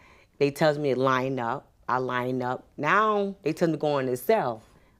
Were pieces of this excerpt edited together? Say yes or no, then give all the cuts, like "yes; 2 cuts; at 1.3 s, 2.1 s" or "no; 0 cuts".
no; 0 cuts